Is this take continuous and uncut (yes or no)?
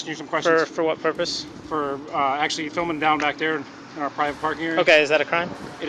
yes